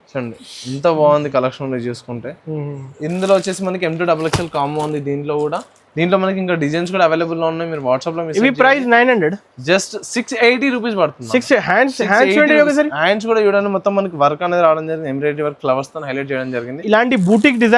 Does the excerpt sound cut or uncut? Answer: uncut